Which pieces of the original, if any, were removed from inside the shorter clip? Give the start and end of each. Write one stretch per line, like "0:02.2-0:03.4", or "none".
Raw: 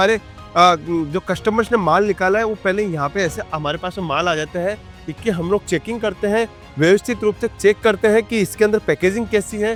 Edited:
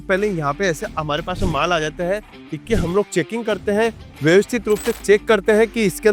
none

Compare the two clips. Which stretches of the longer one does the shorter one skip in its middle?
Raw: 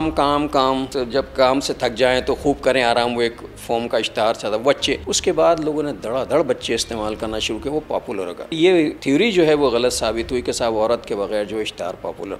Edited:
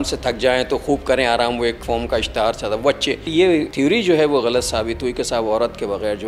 0:03.4-0:03.6
0:05.2-0:08.7

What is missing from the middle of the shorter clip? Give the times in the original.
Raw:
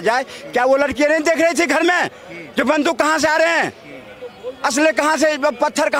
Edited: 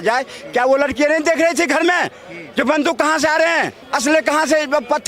0:03.8-0:04.5

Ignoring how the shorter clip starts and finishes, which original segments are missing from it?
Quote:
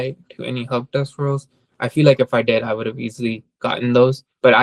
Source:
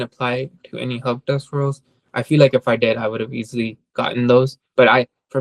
none

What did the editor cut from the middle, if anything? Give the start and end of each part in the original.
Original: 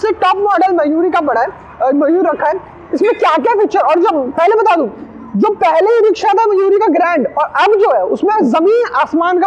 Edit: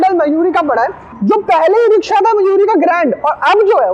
0:01.6-0:05.2

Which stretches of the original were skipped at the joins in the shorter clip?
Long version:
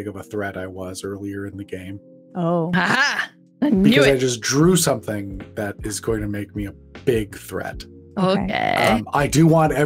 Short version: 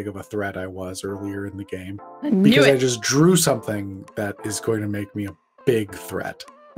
0:02.3-0:03.7

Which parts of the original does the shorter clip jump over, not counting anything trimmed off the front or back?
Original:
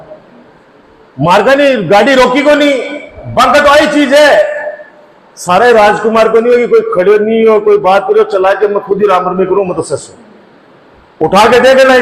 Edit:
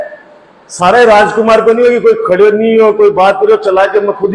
none

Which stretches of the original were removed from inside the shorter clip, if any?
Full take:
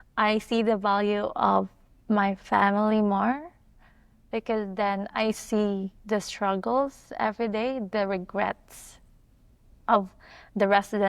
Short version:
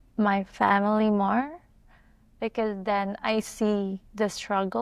none

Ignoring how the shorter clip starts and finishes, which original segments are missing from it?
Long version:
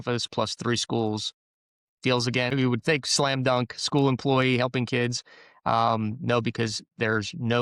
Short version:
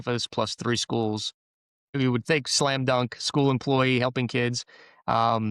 0:01.9-0:02.5

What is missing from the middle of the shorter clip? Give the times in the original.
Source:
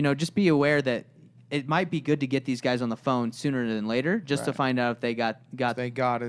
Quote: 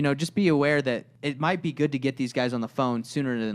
0:01.2-0:01.4

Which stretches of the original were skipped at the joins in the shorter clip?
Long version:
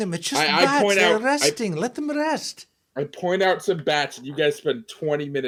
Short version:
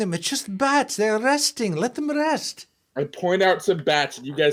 none

